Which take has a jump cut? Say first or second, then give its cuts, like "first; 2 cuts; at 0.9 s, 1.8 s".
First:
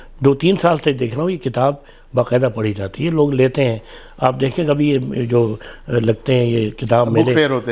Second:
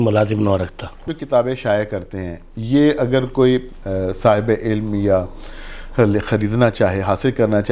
second; 1 cut; at 1.1 s